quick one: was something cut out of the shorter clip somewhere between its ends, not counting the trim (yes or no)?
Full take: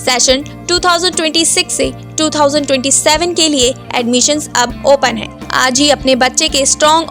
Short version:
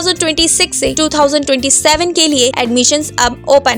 yes